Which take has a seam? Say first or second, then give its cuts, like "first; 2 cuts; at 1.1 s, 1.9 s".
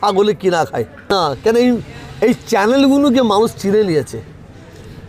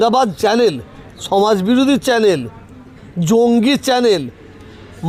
first; 1 cut; at 1.1 s